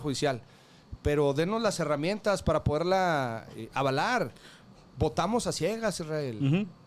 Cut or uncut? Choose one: uncut